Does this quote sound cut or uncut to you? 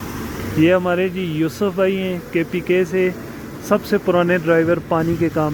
uncut